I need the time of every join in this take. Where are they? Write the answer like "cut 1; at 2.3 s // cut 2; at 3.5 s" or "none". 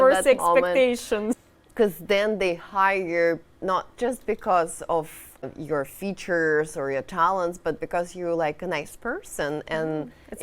cut 1; at 1.4 s // cut 2; at 5.5 s